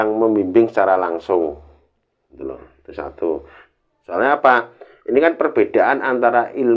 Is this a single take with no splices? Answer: yes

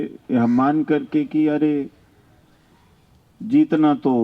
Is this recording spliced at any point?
no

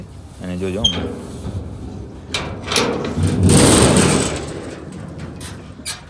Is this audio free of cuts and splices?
yes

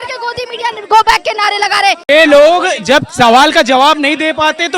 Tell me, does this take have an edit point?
yes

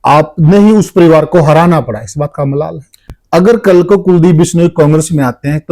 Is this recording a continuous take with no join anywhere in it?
no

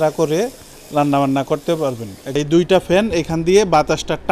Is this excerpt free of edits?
no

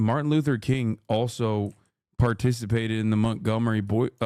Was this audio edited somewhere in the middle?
no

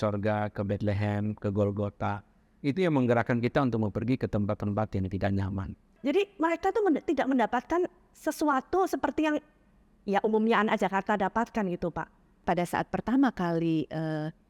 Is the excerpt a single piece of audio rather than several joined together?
no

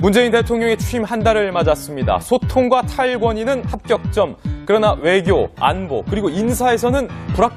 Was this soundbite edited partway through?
no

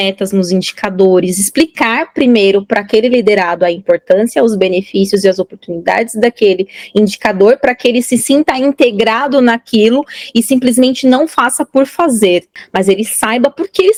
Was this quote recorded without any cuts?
yes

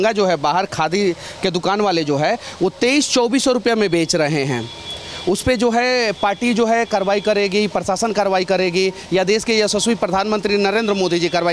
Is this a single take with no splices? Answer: yes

